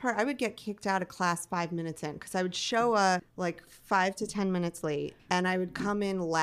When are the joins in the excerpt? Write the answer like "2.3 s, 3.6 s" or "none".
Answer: 3.3 s, 5.2 s